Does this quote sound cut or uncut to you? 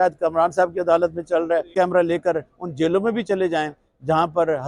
cut